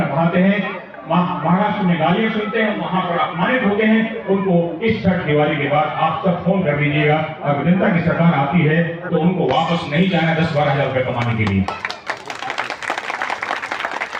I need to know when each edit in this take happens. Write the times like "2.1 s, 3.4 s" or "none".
none